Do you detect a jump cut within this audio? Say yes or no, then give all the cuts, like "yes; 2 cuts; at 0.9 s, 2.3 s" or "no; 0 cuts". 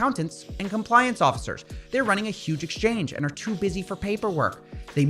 yes; 1 cut; at 1.9 s